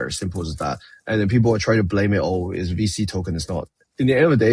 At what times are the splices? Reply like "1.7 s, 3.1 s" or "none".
none